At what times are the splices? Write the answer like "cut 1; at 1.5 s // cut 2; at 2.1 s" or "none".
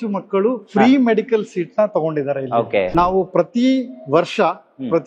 cut 1; at 2.9 s